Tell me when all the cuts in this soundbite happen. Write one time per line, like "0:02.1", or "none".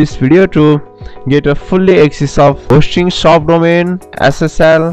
0:04.0